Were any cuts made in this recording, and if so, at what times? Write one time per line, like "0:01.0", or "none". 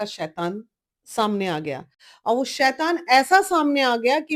none